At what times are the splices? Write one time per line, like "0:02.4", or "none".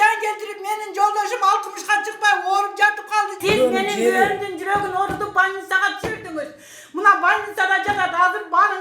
0:03.4

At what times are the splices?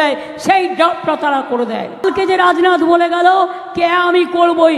0:02.0

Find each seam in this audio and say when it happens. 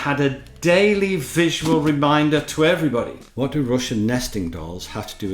0:03.2

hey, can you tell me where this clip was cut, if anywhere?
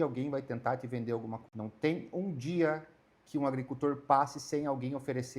0:01.5

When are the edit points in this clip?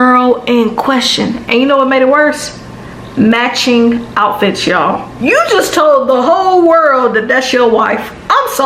0:05.1

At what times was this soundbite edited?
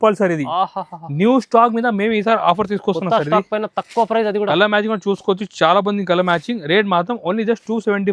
none

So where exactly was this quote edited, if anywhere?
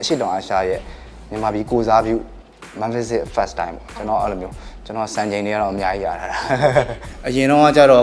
0:07.0

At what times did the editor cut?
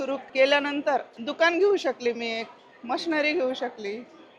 0:01.2

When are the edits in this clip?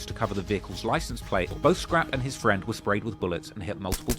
0:01.5

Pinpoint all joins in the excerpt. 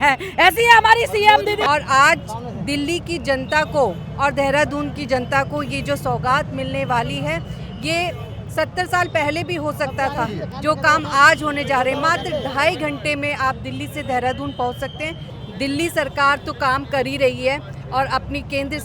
0:01.6
0:15.3

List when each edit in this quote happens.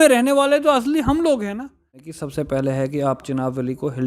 0:02.1

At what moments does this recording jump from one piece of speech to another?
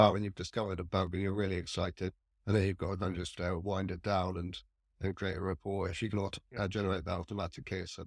none

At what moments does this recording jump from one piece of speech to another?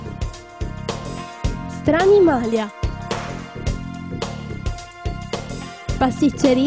0:01.6

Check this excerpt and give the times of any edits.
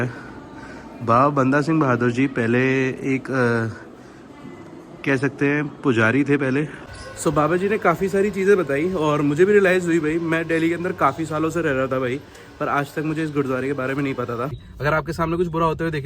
0:06.8
0:14.7

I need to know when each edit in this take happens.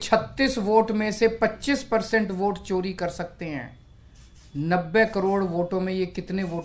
none

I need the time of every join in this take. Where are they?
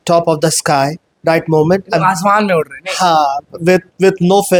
none

